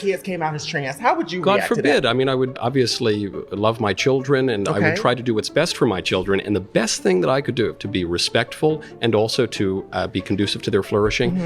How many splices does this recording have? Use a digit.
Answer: 1